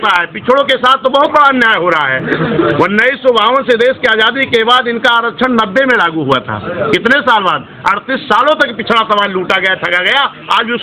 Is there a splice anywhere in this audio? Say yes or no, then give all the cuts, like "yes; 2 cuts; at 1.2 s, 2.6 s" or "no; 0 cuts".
no; 0 cuts